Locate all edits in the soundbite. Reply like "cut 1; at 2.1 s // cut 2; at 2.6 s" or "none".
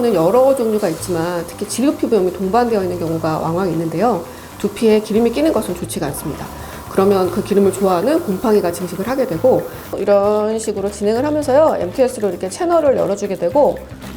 cut 1; at 9.9 s